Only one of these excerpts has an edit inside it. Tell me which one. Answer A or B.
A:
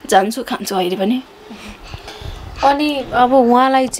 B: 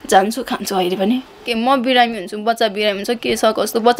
B